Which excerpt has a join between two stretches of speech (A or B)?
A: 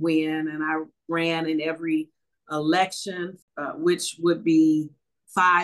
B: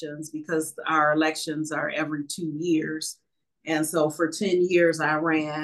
A